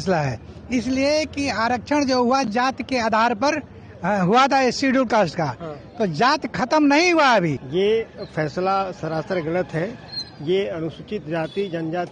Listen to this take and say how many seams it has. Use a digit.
1